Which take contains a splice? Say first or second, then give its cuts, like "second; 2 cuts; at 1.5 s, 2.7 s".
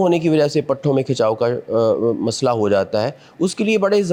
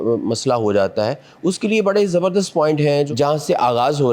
second; 1 cut; at 3.1 s